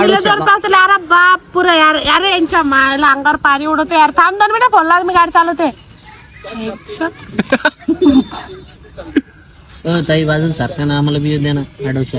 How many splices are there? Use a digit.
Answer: 0